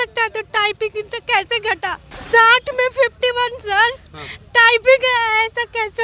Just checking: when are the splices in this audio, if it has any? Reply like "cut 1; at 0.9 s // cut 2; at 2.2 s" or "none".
cut 1; at 2.3 s